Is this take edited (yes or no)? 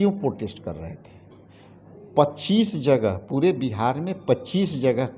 no